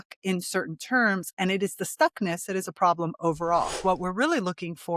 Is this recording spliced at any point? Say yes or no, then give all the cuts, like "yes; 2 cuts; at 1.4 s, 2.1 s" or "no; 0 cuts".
yes; 1 cut; at 3.8 s